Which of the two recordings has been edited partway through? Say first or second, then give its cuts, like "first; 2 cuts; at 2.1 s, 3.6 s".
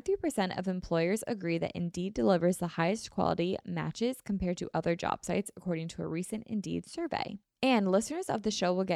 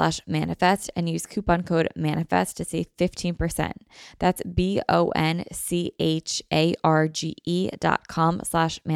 first; 1 cut; at 7.4 s